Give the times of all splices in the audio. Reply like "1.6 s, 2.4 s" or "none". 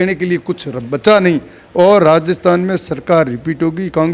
none